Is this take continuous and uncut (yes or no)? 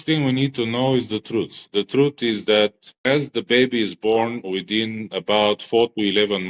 no